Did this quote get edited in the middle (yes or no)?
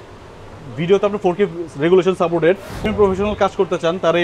yes